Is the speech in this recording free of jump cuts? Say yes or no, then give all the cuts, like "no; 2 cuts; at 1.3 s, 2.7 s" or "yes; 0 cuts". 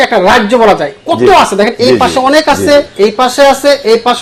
yes; 0 cuts